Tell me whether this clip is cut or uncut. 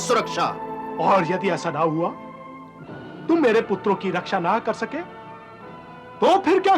uncut